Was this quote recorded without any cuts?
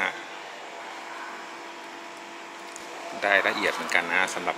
no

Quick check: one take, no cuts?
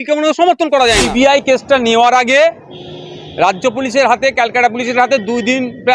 no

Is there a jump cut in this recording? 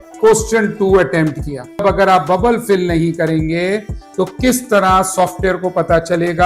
no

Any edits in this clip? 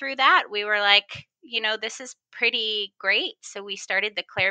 no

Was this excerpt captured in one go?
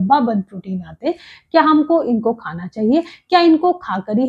yes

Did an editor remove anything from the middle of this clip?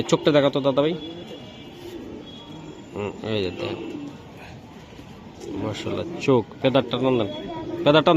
no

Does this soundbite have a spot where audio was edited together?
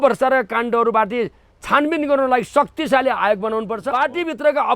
yes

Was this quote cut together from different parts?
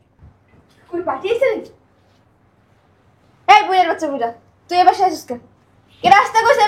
no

